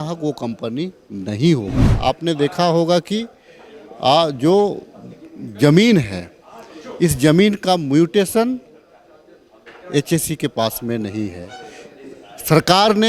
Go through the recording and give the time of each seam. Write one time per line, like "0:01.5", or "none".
0:01.9